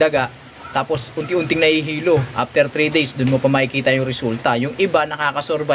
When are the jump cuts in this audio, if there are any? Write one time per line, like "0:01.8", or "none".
none